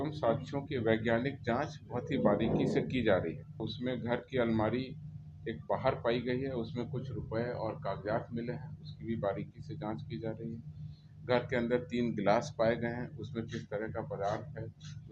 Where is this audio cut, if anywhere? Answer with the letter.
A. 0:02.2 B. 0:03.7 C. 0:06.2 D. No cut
B